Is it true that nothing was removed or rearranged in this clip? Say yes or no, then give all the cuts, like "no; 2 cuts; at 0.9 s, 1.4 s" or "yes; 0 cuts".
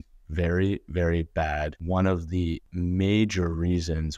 no; 2 cuts; at 1.8 s, 2.7 s